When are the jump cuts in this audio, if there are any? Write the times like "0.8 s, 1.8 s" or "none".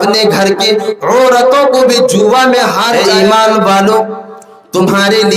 3.0 s